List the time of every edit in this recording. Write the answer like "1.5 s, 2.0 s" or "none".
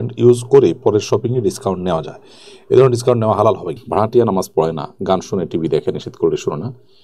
3.7 s